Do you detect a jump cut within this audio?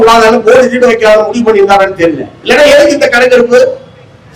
no; 0 cuts

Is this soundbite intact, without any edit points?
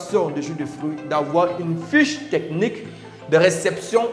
yes; 0 cuts

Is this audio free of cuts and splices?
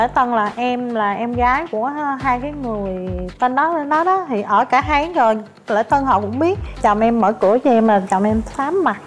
no; 1 cut; at 6.7 s

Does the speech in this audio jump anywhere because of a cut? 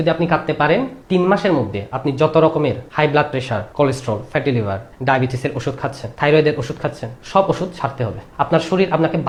no; 0 cuts

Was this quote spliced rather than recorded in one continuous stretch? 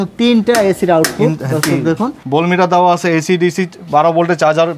yes; 1 cut; at 2.1 s

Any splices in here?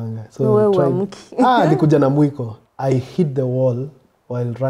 yes; 1 cut; at 2.5 s

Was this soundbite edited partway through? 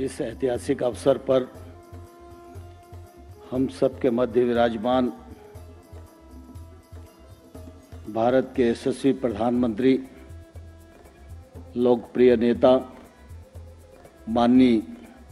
yes; 4 cuts; at 1.5 s, 3.5 s, 5.4 s, 7.6 s

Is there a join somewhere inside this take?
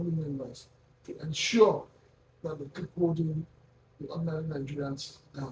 no; 0 cuts

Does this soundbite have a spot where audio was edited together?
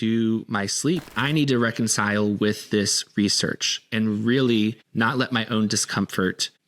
yes; 1 cut; at 1.1 s

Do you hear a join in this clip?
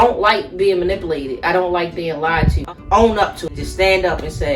yes; 2 cuts; at 2.6 s, 3.5 s

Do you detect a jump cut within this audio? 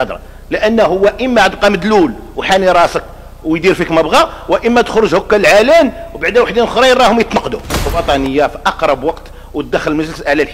yes; 1 cut; at 8.0 s

